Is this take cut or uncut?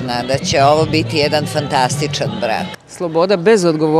cut